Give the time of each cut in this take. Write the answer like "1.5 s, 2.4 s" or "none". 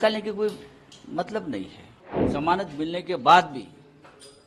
1.8 s